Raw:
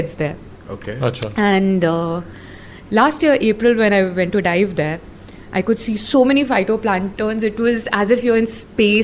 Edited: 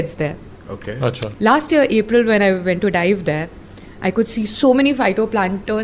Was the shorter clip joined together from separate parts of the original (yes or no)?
yes